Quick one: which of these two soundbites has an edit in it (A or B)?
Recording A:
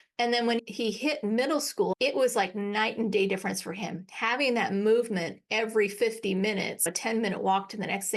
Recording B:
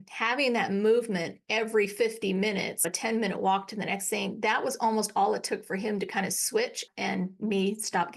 A